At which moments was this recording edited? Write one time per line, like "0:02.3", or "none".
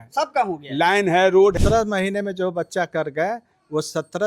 0:01.6